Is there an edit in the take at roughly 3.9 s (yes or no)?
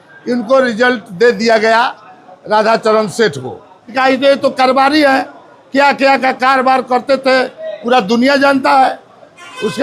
yes